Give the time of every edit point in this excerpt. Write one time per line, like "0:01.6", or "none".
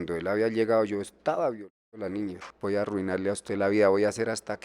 0:02.5